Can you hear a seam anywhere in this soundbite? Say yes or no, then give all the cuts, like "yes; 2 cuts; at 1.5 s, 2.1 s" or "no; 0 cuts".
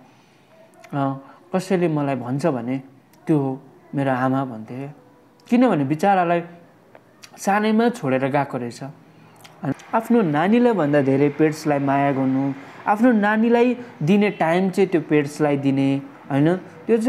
yes; 1 cut; at 9.7 s